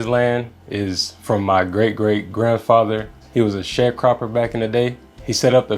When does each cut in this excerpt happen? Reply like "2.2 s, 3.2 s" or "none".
3.2 s